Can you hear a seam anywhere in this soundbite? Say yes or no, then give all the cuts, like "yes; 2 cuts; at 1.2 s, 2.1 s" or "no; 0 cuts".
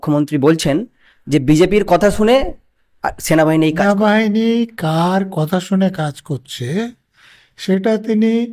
yes; 1 cut; at 3.8 s